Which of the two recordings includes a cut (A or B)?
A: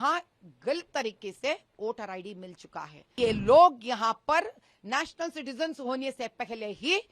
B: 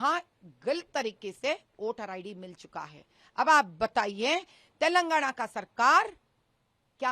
A